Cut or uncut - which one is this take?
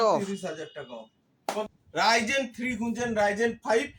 cut